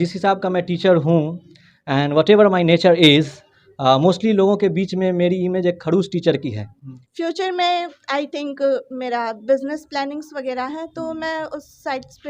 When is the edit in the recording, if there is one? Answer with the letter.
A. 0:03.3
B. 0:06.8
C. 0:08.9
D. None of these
B